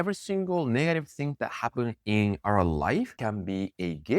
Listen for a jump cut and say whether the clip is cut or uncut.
cut